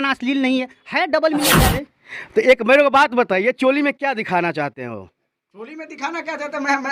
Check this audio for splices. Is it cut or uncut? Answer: cut